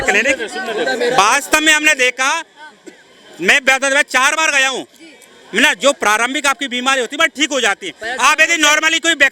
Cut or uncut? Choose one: uncut